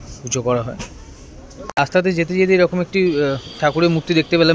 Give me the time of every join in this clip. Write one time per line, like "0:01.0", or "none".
0:01.8